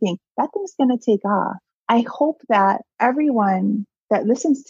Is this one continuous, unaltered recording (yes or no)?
no